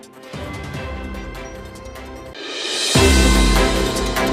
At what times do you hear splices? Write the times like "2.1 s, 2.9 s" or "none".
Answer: 2.3 s